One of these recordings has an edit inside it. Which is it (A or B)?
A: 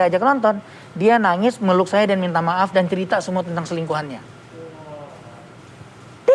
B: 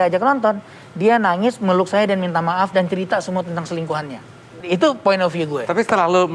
B